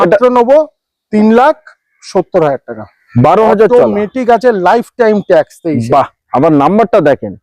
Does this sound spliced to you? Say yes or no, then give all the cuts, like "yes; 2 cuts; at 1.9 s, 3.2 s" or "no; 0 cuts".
yes; 1 cut; at 3.1 s